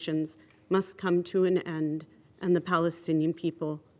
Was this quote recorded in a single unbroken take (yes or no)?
yes